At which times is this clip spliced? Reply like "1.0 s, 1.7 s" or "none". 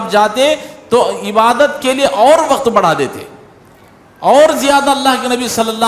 none